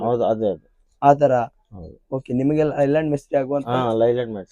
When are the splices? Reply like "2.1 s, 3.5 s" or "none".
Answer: none